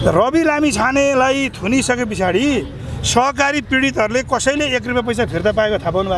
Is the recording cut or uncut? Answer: uncut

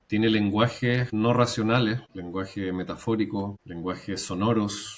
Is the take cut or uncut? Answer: cut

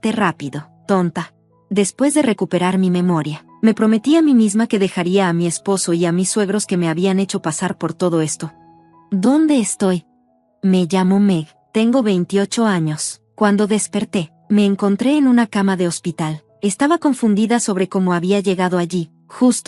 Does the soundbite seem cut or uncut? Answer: uncut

